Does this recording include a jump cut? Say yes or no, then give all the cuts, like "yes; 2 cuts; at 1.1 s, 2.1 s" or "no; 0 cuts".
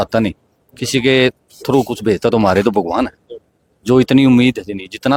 no; 0 cuts